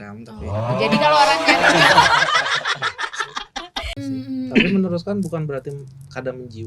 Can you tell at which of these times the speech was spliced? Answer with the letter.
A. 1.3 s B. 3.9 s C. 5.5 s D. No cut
B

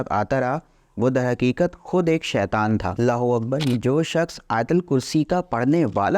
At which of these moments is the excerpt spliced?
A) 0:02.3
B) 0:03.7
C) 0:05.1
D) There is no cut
B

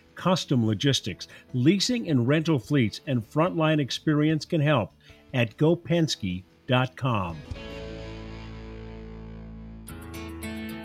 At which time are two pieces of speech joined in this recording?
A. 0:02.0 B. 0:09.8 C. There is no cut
B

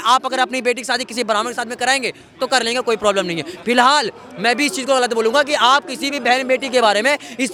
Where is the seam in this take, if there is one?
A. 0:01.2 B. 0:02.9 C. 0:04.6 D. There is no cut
D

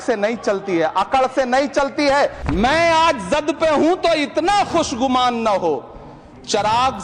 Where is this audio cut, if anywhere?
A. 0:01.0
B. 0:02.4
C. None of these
B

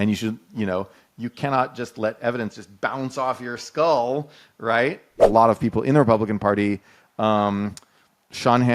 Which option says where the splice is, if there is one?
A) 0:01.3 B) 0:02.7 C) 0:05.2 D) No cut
C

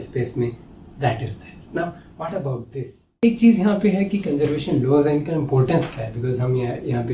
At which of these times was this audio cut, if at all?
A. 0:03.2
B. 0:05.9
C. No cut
A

